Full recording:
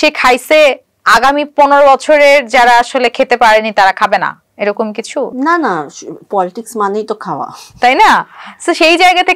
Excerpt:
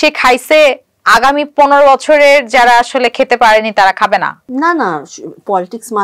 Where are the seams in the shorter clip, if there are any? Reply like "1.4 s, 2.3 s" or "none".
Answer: 4.5 s